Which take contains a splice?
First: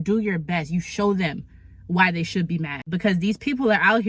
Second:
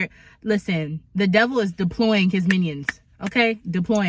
first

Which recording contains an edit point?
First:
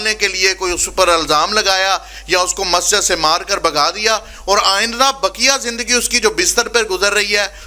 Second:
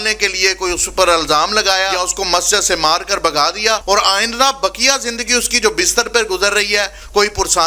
second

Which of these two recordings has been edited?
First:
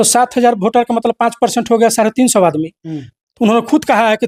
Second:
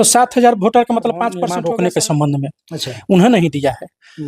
second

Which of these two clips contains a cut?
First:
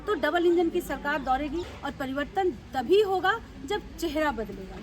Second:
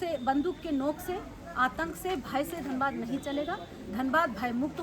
first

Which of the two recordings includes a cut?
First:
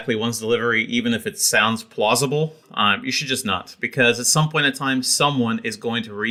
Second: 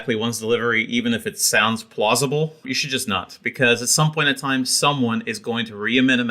second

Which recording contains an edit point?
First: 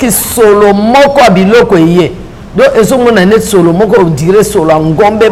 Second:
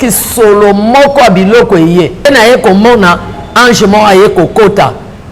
second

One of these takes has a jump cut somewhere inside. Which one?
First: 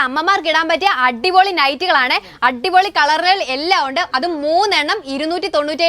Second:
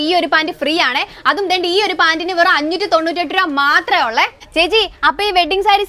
second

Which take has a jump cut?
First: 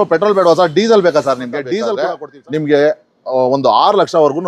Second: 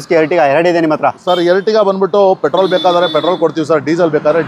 first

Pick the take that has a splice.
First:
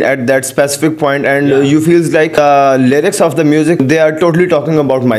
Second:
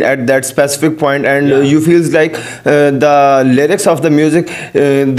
first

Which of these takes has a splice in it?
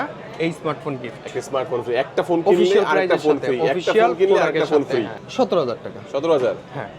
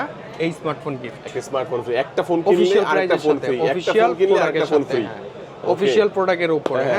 first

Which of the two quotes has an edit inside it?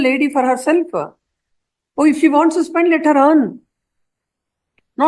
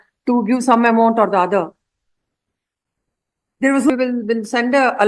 second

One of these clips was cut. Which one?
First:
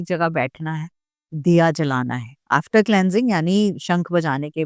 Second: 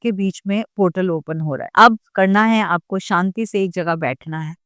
second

